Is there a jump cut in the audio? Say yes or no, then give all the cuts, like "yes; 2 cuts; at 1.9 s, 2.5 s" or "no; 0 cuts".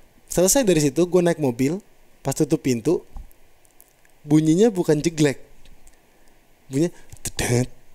no; 0 cuts